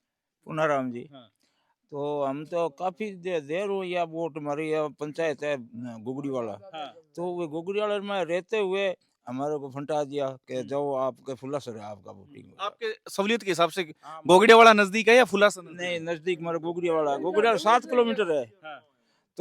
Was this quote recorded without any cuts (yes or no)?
yes